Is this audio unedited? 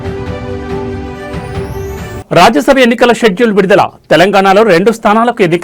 no; 1 cut; at 2.2 s

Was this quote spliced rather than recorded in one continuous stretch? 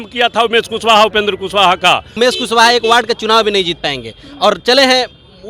yes; 1 cut; at 2.1 s

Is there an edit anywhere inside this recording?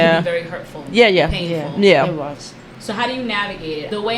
no; 0 cuts

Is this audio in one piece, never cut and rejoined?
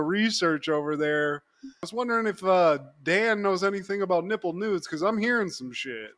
yes; 0 cuts

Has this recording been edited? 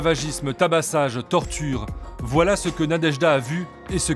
no; 0 cuts

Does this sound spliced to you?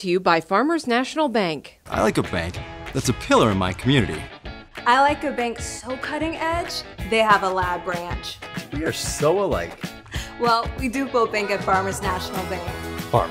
no; 0 cuts

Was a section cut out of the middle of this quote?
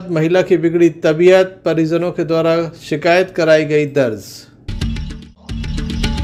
yes; 1 cut; at 4.7 s

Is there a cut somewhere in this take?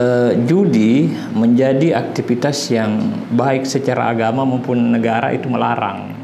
no; 0 cuts

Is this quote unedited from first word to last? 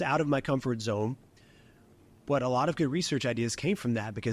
yes; 0 cuts

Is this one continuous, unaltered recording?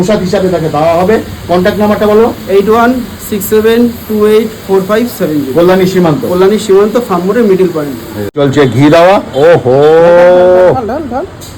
no; 1 cut; at 8.2 s

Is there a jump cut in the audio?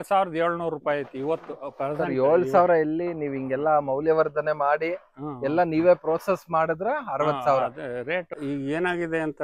yes; 1 cut; at 8.4 s

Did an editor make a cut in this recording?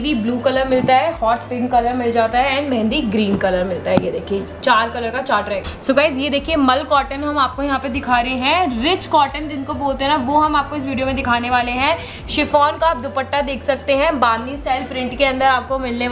no; 0 cuts

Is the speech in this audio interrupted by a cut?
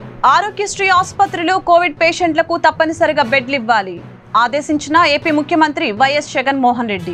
no; 0 cuts

